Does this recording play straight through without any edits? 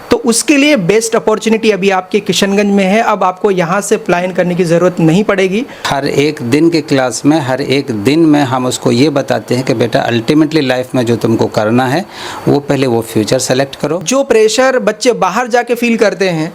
no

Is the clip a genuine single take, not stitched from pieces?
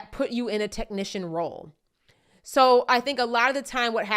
yes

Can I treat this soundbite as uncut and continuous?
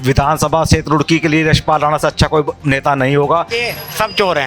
no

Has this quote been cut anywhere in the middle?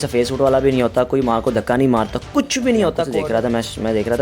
yes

